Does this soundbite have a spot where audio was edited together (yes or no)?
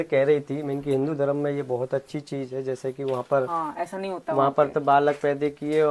no